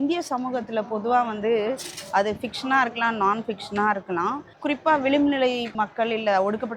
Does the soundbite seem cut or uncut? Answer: cut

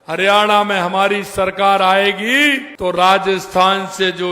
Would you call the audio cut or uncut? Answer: cut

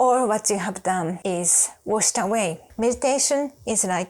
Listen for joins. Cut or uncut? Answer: cut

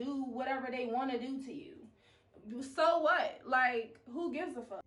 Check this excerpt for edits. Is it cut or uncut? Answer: uncut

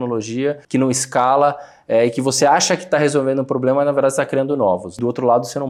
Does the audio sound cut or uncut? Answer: uncut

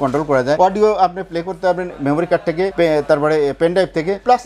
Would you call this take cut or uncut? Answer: uncut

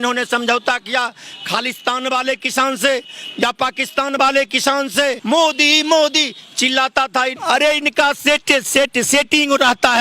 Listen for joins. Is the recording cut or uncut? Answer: cut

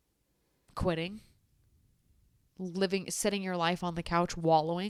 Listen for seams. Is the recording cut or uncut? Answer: uncut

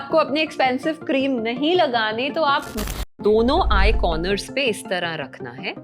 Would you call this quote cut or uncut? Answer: cut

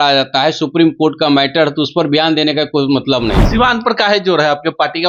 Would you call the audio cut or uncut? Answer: cut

